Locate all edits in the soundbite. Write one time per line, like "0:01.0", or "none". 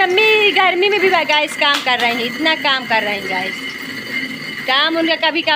none